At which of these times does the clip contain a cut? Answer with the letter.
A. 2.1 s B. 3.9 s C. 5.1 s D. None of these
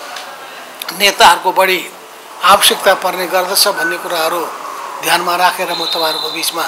D